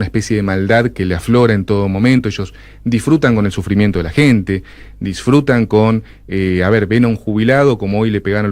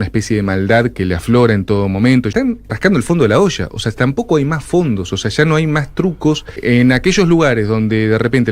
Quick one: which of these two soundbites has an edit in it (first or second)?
second